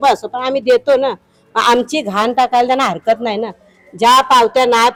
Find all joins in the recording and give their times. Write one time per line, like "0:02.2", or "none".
none